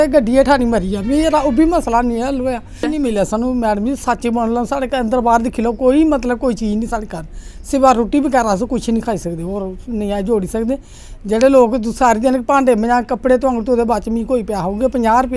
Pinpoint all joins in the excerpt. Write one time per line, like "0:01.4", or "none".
0:02.8